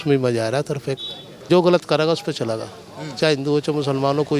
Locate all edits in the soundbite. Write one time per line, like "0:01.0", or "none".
0:01.4